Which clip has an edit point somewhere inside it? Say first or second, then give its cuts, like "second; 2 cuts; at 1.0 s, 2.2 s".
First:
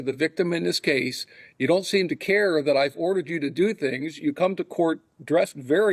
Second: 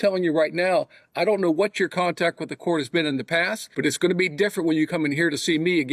second; 1 cut; at 3.6 s